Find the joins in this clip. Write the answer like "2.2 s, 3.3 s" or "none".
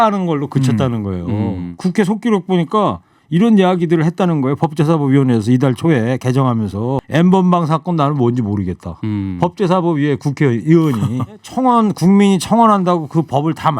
1.7 s, 7.0 s, 11.5 s